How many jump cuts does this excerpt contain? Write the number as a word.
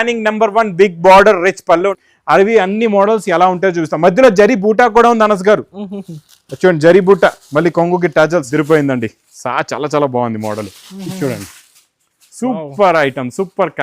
two